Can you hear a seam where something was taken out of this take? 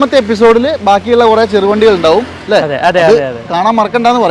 no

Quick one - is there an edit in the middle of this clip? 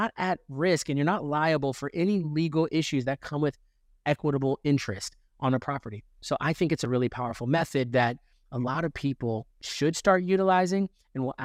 no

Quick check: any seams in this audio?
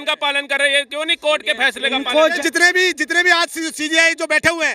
yes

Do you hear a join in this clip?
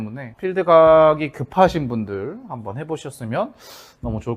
no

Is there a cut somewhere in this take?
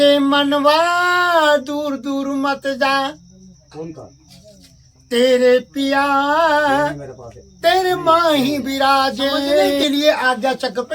yes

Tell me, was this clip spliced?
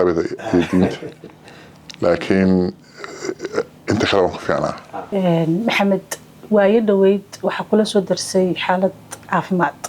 yes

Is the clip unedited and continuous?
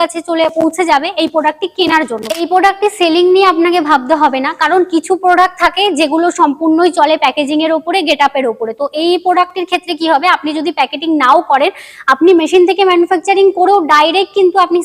no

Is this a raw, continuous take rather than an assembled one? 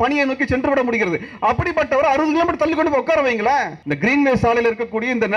no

